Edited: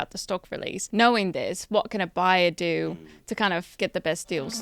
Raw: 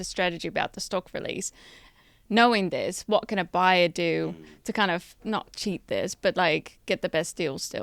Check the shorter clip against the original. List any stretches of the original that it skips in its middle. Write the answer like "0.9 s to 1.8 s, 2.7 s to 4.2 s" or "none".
1.5 s to 2.2 s, 5.1 s to 6.8 s